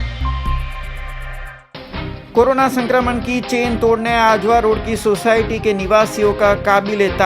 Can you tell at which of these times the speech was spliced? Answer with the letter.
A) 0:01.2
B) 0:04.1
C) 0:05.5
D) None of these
A